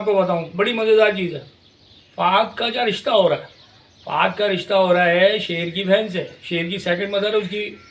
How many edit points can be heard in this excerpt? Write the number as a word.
zero